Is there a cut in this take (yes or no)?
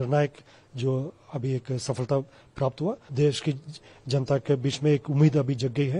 yes